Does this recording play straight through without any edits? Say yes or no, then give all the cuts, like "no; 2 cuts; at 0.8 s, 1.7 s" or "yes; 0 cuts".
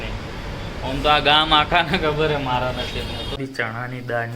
no; 1 cut; at 3.4 s